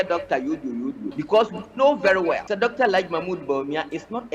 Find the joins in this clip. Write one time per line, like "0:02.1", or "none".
0:01.1
0:02.5